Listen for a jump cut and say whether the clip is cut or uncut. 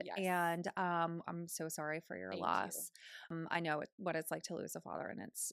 cut